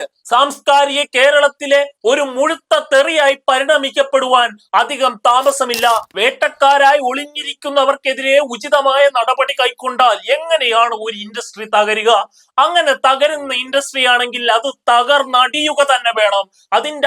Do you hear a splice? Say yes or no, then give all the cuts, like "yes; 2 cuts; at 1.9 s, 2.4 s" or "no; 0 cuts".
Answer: yes; 1 cut; at 6.1 s